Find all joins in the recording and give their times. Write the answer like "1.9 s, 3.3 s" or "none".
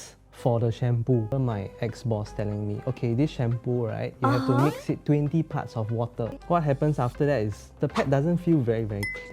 1.3 s, 6.4 s